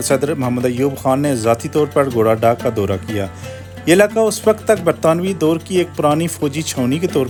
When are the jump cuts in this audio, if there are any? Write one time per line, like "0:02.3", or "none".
none